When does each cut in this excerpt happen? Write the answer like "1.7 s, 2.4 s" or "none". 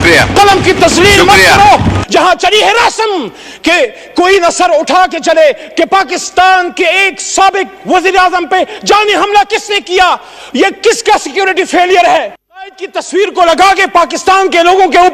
2.0 s, 5.7 s, 12.3 s